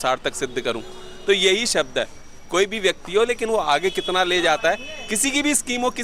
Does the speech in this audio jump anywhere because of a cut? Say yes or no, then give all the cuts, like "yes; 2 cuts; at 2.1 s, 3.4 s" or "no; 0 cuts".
no; 0 cuts